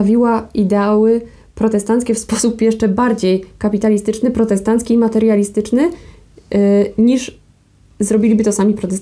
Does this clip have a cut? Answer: no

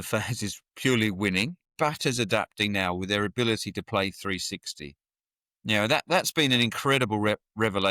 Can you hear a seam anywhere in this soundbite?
yes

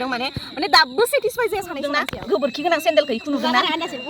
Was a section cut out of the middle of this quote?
yes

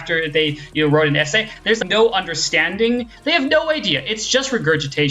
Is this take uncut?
no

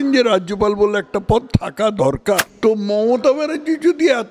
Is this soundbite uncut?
no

